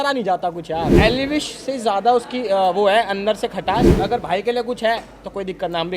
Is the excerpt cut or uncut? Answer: cut